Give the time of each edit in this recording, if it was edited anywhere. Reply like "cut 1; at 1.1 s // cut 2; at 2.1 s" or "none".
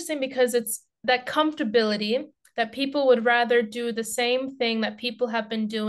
none